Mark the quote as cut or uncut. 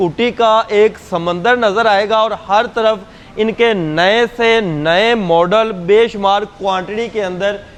uncut